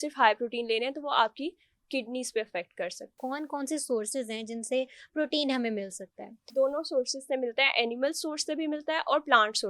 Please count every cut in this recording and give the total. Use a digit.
2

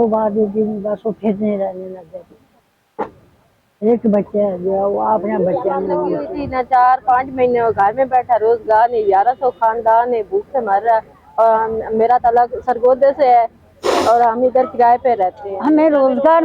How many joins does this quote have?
2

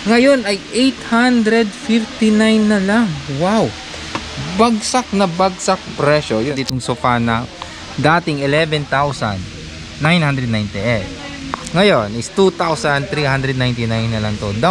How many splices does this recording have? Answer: 1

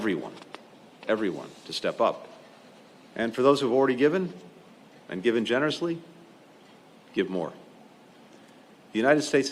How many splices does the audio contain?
0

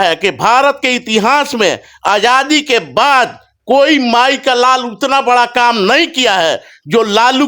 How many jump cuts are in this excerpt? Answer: 0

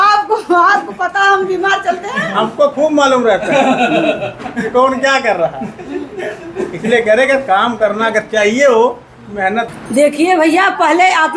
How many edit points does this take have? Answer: 1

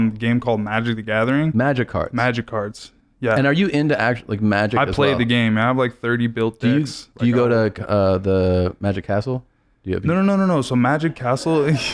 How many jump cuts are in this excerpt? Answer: 1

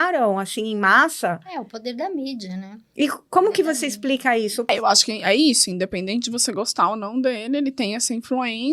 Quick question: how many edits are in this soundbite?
1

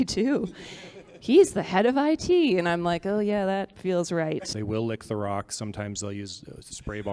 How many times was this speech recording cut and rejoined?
1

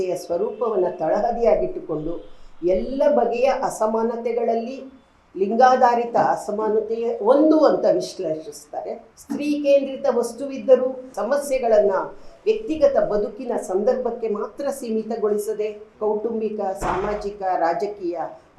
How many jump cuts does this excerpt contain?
3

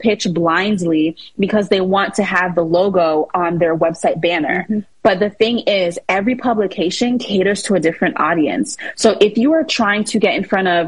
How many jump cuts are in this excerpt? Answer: 0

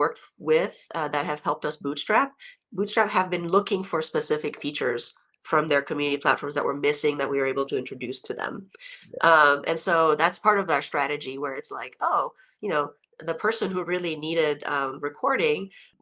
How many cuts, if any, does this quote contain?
0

